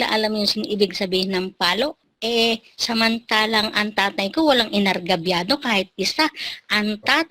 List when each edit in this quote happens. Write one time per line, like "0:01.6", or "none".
0:02.1